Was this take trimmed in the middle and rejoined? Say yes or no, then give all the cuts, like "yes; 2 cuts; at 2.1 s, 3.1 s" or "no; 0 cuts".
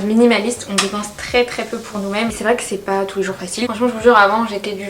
yes; 2 cuts; at 2.3 s, 3.7 s